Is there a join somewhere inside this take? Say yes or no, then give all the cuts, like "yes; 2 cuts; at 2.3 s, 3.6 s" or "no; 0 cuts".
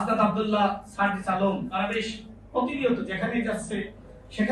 no; 0 cuts